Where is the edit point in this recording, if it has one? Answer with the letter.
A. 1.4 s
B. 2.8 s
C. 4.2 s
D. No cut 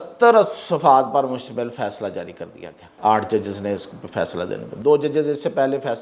B